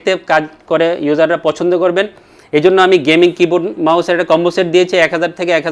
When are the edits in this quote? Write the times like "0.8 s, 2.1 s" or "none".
none